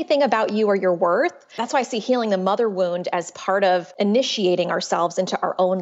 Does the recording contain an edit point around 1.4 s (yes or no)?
yes